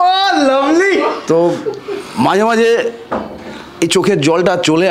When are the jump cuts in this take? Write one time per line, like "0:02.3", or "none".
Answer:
none